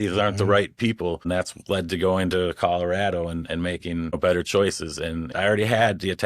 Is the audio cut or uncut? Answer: cut